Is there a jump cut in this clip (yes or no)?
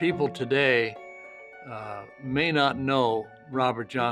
no